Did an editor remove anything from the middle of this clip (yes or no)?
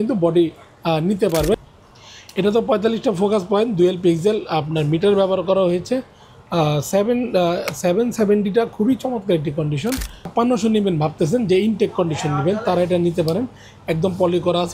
yes